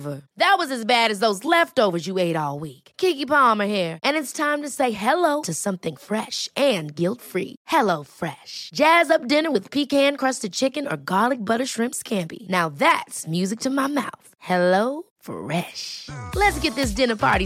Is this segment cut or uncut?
uncut